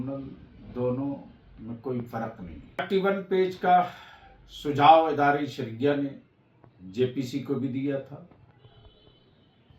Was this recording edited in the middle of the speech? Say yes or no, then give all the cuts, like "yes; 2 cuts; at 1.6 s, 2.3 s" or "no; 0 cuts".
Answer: yes; 1 cut; at 2.8 s